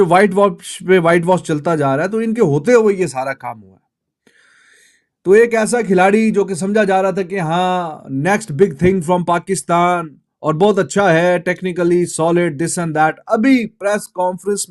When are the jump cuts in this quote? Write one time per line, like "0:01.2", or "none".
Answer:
none

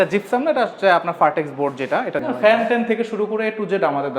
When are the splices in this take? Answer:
0:02.2

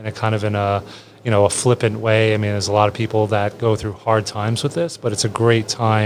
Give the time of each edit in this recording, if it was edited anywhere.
none

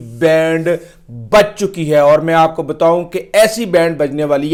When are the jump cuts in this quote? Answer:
none

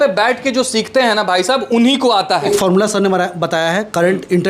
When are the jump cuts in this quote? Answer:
0:02.4

